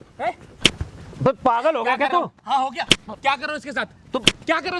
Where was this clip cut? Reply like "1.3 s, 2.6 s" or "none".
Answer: none

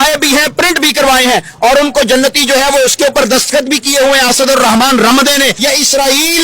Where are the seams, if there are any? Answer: 5.5 s

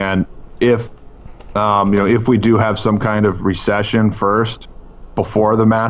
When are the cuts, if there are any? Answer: none

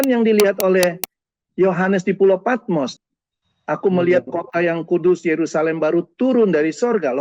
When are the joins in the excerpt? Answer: 2.9 s

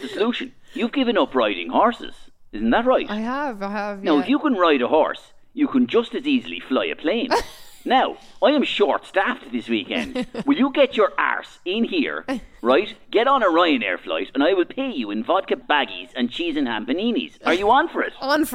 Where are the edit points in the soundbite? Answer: 15.6 s

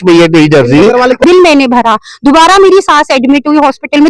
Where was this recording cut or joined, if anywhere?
1.2 s

